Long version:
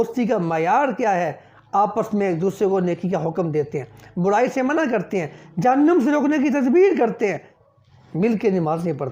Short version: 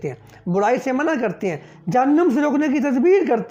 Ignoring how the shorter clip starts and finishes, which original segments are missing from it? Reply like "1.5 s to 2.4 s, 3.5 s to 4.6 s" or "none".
none

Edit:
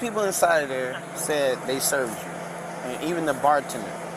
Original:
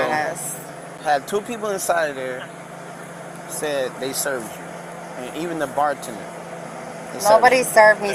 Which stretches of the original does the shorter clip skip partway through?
2.6 s to 3.4 s

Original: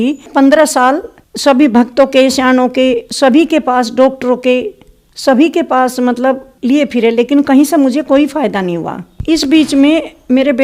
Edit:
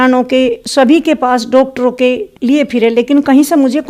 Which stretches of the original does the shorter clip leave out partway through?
4.8 s to 6.5 s

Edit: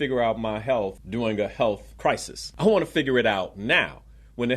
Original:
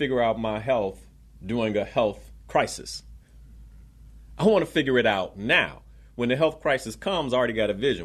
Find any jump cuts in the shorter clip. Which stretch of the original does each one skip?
1.0 s to 1.4 s, 2.3 s to 3.8 s

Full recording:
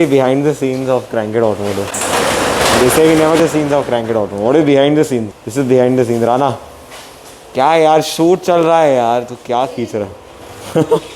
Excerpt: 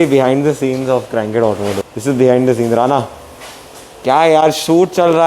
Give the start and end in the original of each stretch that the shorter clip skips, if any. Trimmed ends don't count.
1.9 s to 5.4 s

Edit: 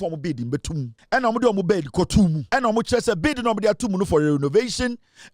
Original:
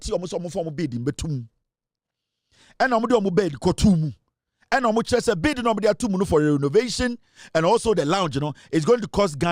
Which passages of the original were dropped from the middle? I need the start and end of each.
1.5 s to 2.6 s, 4.1 s to 4.6 s

